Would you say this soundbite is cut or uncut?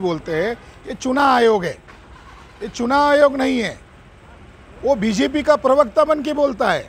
uncut